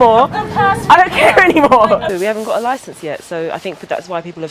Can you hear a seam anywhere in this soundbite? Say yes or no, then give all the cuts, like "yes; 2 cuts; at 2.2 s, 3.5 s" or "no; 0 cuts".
yes; 1 cut; at 2.1 s